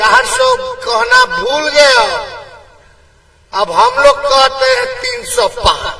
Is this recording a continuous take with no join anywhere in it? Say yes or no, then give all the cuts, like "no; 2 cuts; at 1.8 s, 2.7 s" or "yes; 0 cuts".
yes; 0 cuts